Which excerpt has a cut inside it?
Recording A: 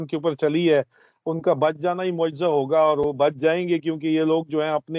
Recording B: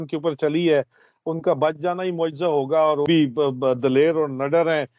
B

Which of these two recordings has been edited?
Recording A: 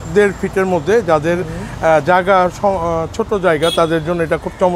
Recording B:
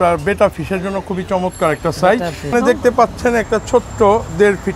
B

